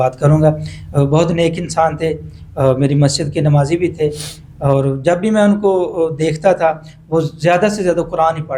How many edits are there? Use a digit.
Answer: 0